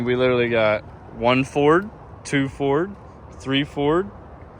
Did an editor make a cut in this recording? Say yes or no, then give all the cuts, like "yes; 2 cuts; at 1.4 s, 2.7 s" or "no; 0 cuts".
no; 0 cuts